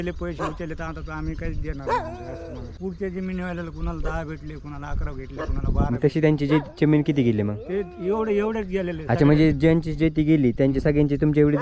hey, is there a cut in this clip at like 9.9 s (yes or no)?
no